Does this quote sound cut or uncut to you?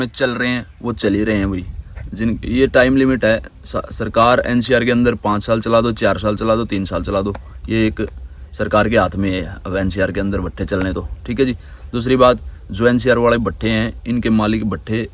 uncut